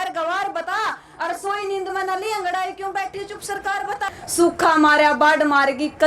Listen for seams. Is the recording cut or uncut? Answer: cut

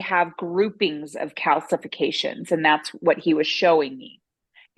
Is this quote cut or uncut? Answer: uncut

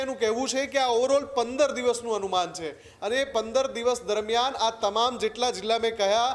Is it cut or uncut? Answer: uncut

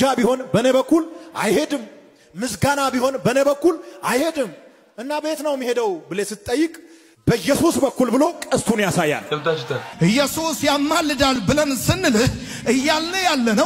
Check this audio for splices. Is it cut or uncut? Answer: cut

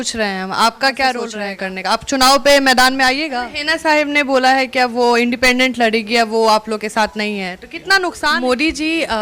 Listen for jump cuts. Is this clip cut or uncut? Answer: cut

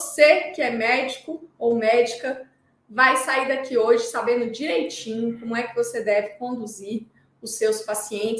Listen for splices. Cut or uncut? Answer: uncut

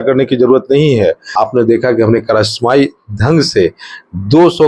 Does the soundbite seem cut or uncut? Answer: cut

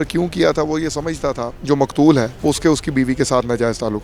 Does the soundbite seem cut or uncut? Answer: cut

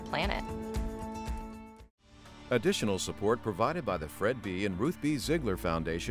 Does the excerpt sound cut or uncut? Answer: cut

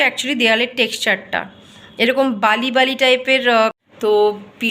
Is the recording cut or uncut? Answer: cut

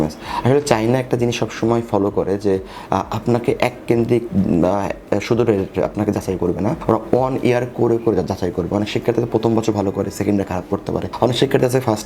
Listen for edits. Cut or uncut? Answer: cut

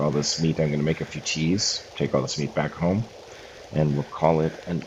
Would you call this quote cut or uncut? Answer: uncut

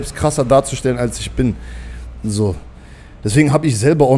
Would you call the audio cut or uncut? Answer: uncut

